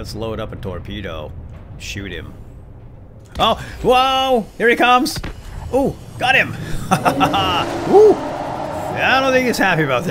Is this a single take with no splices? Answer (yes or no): yes